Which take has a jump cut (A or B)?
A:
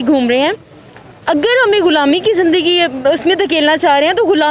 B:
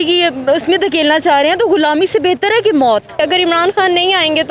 B